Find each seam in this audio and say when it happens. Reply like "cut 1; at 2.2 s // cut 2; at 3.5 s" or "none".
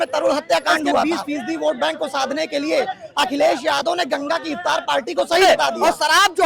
cut 1; at 1.0 s // cut 2; at 5.4 s